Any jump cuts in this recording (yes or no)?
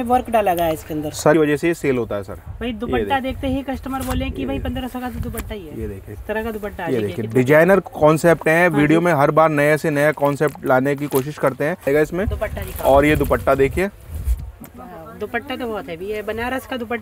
yes